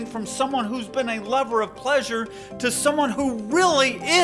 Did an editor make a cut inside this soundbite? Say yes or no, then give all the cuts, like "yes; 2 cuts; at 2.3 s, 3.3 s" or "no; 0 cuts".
no; 0 cuts